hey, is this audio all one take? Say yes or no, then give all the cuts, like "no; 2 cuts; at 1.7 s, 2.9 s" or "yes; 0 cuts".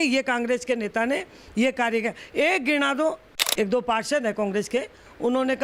no; 1 cut; at 3.3 s